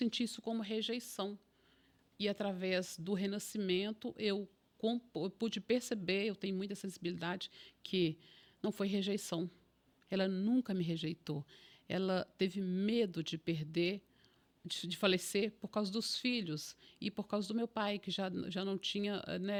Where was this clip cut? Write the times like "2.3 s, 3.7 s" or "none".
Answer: none